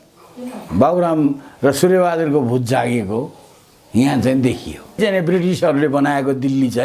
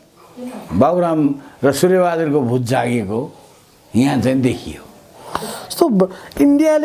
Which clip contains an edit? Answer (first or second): first